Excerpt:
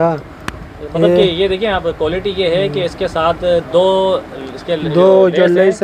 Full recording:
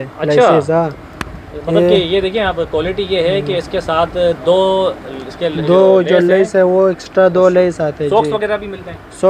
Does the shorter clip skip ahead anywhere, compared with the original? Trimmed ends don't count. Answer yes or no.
no